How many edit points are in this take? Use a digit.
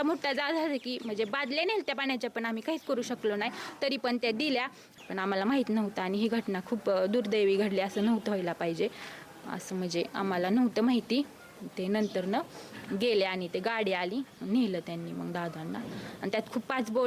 1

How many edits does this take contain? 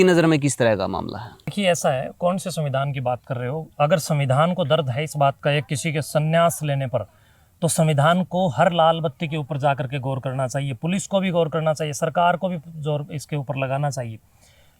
1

